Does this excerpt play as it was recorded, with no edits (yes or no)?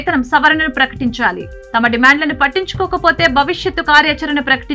yes